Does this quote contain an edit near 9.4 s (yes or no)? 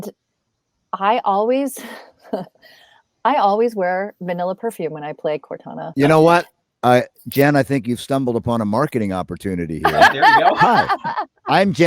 no